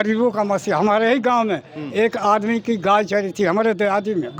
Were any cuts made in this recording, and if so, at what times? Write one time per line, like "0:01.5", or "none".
none